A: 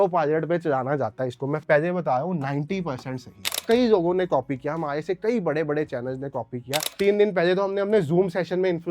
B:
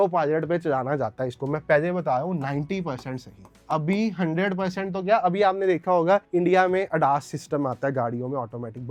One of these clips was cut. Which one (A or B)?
A